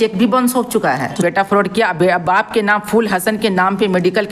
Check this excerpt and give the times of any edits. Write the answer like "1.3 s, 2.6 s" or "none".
1.1 s